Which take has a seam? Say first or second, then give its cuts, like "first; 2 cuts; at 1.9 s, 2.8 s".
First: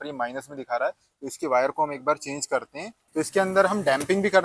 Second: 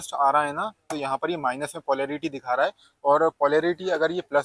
first; 1 cut; at 3.0 s